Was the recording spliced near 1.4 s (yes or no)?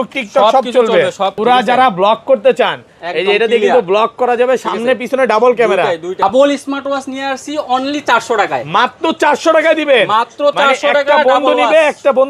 yes